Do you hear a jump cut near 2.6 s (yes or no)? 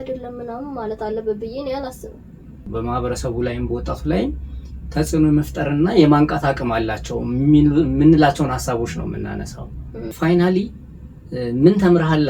yes